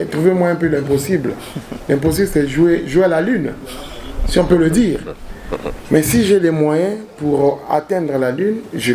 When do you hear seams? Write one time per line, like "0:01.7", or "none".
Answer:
none